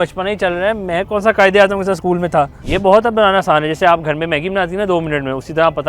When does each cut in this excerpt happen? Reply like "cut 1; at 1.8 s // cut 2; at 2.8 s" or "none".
cut 1; at 2.6 s